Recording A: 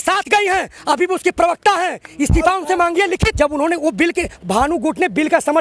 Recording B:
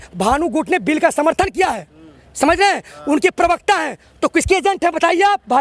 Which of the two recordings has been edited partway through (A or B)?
A